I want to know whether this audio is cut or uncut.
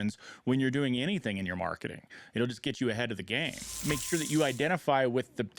cut